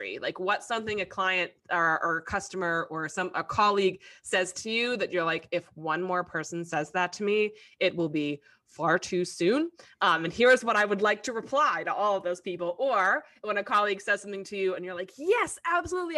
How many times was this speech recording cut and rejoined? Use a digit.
0